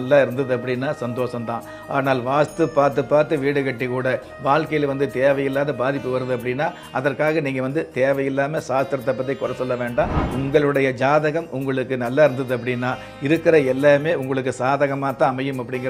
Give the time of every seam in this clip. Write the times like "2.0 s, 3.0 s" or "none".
10.2 s